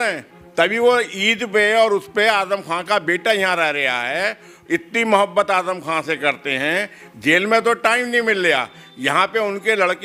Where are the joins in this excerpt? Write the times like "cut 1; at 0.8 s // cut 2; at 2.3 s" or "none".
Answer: none